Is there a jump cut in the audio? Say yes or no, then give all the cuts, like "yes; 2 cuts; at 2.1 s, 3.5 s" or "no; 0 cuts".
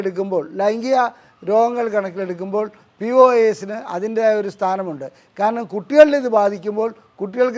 no; 0 cuts